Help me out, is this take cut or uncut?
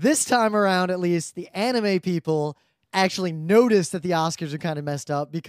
cut